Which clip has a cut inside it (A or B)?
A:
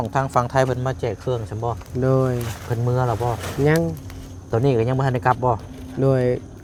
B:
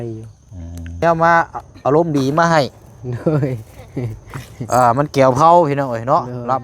B